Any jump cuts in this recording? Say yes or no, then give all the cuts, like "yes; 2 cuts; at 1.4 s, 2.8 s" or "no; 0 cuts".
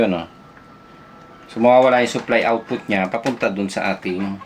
no; 0 cuts